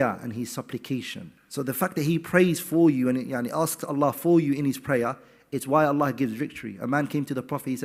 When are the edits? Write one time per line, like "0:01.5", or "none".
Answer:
none

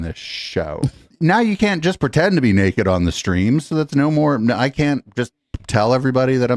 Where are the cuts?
0:01.0

